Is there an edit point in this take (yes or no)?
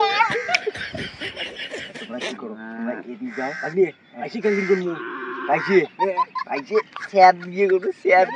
no